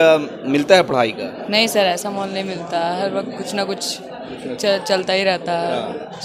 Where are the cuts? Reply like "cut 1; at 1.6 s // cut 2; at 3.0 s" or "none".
none